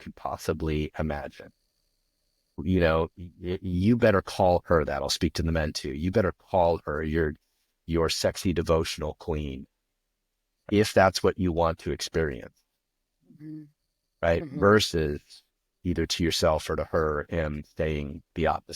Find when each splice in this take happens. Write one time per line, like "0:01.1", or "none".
0:02.6
0:10.6